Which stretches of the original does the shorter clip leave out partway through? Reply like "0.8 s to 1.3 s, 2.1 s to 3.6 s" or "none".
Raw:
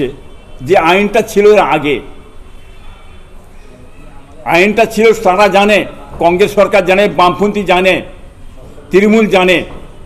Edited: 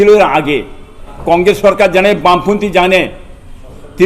2.4 s to 6.0 s

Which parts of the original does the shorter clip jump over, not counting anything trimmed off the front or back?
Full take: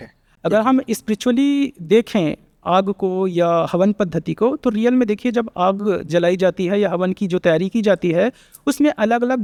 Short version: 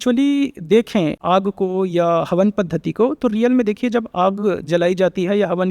2.4 s to 2.6 s

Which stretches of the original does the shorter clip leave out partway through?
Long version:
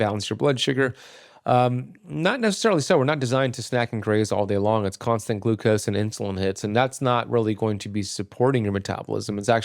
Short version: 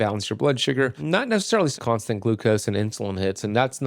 1.0 s to 2.1 s, 2.8 s to 4.9 s

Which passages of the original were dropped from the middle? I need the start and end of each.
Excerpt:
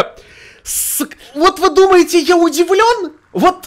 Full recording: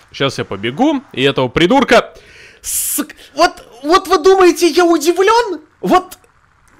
3.2 s to 3.7 s

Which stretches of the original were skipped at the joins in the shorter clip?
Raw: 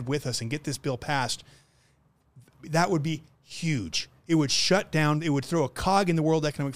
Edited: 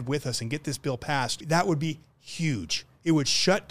1.4 s to 2.6 s

